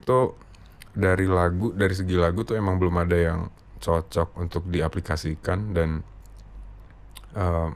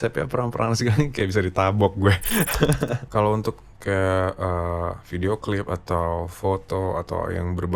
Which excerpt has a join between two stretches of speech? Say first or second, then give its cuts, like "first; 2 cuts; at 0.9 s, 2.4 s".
second; 1 cut; at 3.0 s